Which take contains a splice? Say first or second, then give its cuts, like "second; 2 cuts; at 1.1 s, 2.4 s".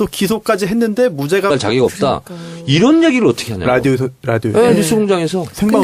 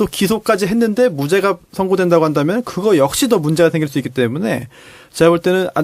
second; 1 cut; at 1.5 s